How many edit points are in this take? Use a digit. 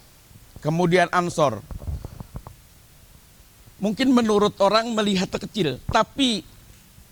0